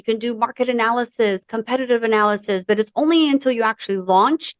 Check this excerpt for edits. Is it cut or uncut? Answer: uncut